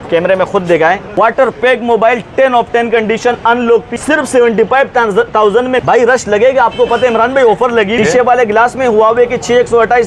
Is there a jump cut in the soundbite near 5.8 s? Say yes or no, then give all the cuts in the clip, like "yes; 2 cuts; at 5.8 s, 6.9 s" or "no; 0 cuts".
yes; 4 cuts; at 1.1 s, 3.9 s, 5.8 s, 7.9 s